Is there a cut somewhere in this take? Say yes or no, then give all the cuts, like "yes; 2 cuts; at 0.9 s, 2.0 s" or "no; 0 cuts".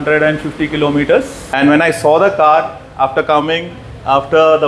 yes; 1 cut; at 1.4 s